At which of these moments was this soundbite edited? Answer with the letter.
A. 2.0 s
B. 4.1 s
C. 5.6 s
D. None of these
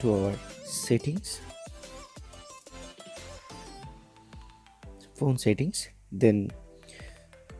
D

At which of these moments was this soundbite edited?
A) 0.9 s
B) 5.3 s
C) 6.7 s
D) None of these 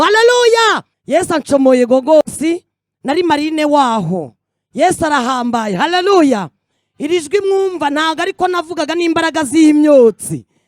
A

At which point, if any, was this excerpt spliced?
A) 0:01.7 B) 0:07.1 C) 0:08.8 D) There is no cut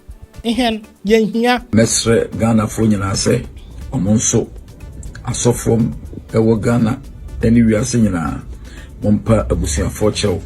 A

